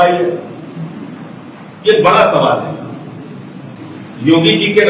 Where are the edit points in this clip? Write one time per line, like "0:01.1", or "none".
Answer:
0:03.7